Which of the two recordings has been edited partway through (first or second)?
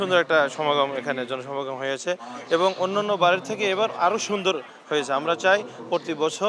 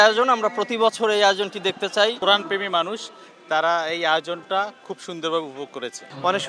second